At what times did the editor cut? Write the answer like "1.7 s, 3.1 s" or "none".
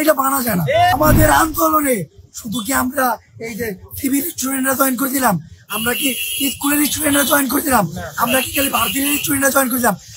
0.9 s